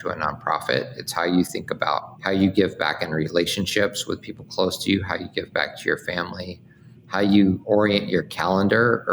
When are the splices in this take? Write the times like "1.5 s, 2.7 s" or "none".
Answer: 2.1 s, 7.6 s